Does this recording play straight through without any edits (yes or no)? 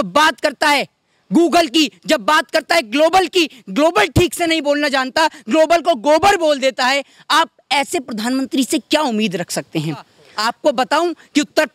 no